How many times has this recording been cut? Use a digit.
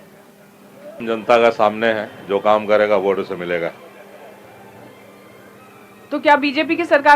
1